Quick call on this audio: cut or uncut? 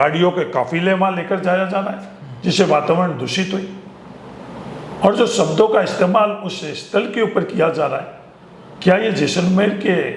uncut